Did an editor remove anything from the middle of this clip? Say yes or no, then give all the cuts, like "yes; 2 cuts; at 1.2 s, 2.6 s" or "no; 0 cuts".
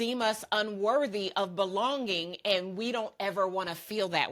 no; 0 cuts